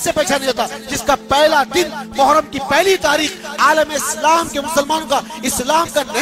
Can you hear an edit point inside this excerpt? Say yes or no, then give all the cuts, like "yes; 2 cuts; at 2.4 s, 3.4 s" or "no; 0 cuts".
no; 0 cuts